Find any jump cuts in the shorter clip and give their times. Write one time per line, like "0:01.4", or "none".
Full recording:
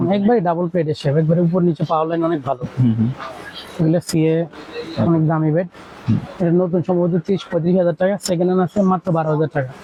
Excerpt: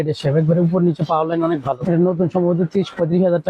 0:01.8

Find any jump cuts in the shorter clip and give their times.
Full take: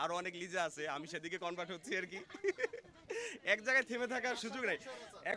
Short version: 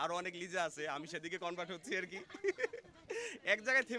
none

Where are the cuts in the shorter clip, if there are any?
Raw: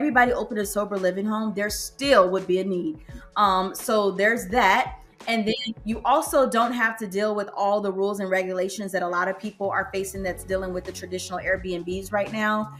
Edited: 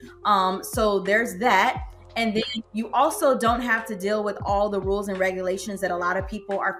none

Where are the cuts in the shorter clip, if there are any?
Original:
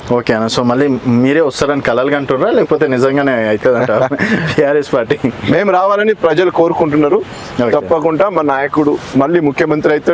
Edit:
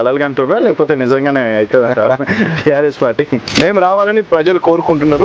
none

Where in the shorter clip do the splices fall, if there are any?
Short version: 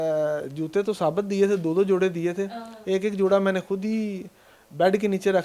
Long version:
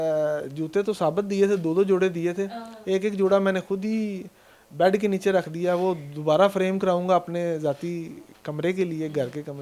none

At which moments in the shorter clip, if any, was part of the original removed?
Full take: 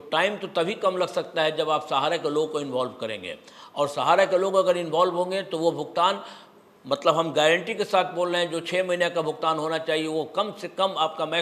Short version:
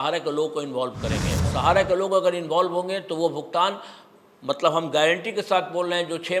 0:01.5

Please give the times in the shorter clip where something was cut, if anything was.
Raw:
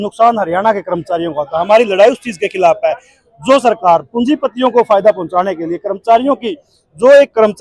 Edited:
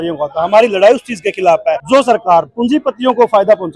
0:01.8

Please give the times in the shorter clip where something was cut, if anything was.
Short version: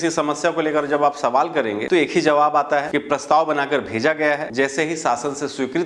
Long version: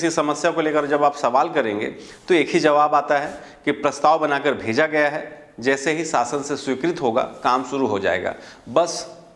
0:01.8
0:02.9
0:04.5

